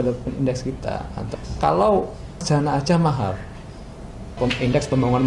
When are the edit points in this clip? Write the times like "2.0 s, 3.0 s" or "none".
1.3 s, 2.4 s, 4.4 s